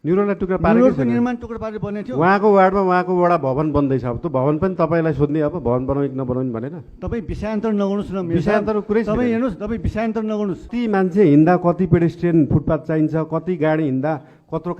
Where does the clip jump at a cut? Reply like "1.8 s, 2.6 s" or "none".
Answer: 10.7 s